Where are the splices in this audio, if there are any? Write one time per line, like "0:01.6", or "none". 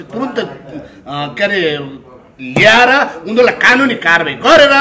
none